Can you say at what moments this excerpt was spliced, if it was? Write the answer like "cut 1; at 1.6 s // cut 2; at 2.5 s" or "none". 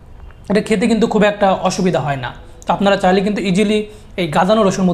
none